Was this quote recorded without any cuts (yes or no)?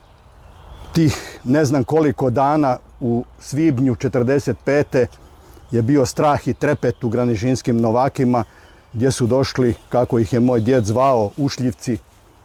yes